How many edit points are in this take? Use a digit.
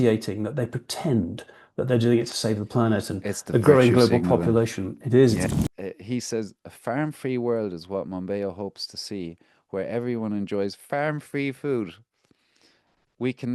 1